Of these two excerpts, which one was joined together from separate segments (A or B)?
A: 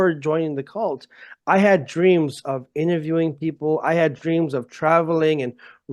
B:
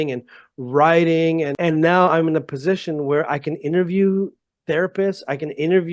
B